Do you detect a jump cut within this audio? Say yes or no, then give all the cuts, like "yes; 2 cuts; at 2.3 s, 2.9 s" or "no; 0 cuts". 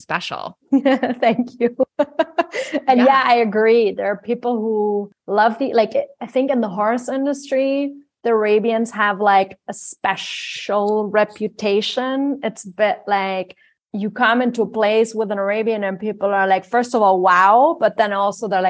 no; 0 cuts